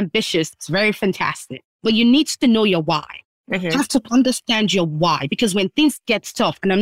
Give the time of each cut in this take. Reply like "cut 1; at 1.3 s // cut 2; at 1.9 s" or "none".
cut 1; at 3.4 s